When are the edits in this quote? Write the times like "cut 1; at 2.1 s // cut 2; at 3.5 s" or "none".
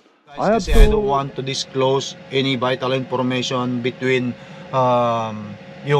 cut 1; at 1.1 s